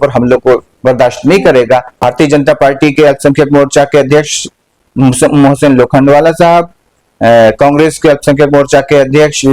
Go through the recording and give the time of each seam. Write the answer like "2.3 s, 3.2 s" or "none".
2.0 s